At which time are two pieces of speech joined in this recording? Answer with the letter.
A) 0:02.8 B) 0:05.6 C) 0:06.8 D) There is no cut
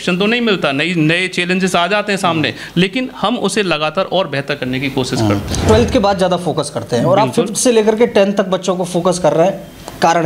B